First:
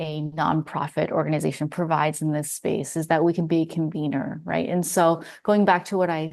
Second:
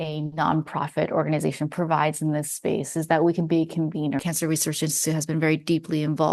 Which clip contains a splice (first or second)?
second